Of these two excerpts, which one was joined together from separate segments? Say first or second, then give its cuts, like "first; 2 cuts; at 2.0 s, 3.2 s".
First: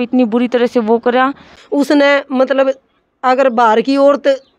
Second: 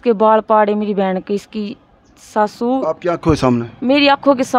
first; 1 cut; at 1.6 s